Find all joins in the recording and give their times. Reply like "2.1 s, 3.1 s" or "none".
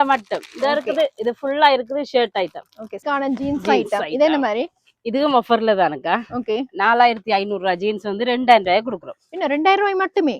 3.0 s